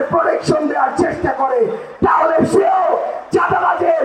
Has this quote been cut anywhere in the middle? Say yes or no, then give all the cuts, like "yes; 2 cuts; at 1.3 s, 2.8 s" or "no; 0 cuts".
no; 0 cuts